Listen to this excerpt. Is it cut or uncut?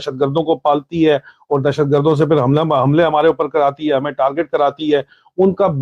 uncut